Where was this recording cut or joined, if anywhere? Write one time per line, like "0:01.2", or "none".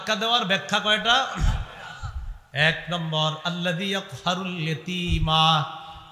none